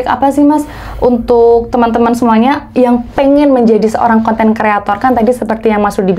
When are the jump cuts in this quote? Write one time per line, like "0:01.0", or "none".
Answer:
none